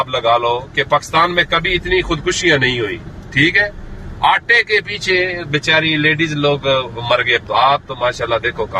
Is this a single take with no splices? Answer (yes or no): no